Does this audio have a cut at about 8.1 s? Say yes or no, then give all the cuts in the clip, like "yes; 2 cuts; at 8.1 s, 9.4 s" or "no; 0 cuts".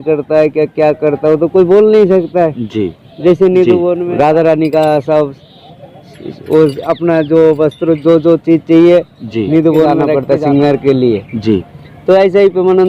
no; 2 cuts; at 4.0 s, 10.2 s